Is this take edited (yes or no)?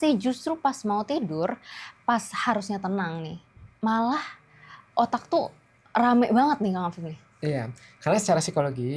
no